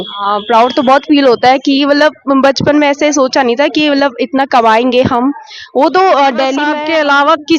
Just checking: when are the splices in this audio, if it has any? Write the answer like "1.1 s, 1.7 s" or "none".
6.7 s

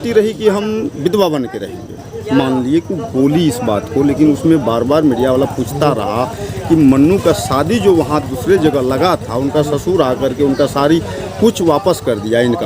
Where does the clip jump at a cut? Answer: none

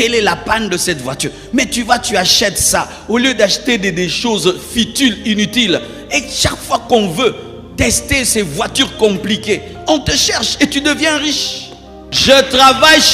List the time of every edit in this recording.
12.1 s

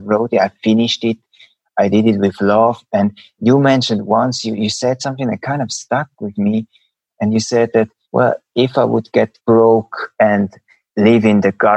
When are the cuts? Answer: 5.8 s, 8.0 s, 9.4 s, 10.4 s

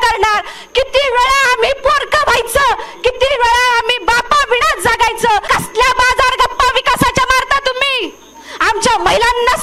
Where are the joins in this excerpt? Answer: 5.4 s

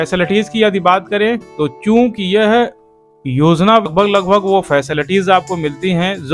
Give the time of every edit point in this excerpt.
3.9 s

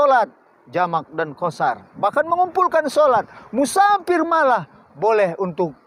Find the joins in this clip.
none

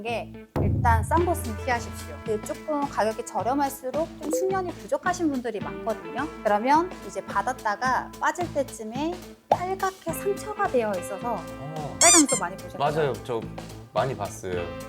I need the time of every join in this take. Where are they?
2.2 s

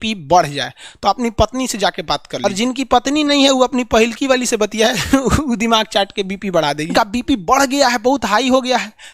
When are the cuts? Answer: 2.4 s, 6.9 s

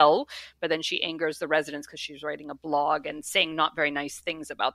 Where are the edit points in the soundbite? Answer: none

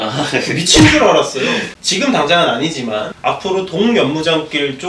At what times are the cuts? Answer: 1.7 s

